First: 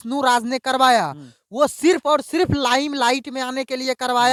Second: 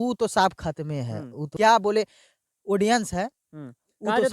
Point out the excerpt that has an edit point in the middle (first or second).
second